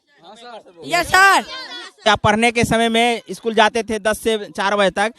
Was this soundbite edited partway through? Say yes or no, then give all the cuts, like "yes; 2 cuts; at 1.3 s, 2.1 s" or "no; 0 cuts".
yes; 1 cut; at 2.1 s